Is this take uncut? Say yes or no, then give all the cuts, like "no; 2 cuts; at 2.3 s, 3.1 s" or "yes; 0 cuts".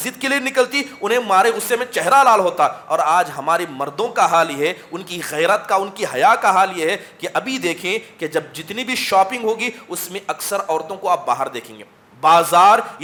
yes; 0 cuts